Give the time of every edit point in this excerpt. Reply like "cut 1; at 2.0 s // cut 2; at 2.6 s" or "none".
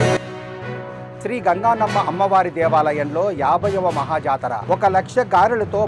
none

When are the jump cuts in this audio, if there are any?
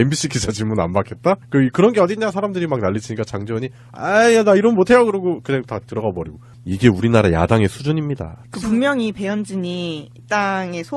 cut 1; at 6.8 s

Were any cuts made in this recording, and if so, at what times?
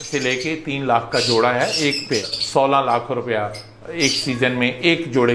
cut 1; at 2.4 s

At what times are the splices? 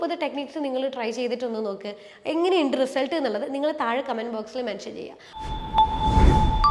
cut 1; at 5.2 s

